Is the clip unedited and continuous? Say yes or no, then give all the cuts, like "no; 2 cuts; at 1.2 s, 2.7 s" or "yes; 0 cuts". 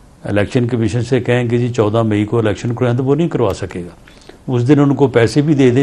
yes; 0 cuts